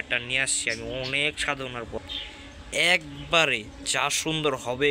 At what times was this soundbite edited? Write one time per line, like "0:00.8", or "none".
0:02.0